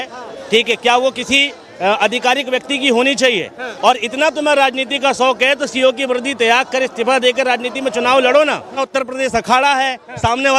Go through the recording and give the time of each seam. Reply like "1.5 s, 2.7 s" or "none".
5.3 s, 8.8 s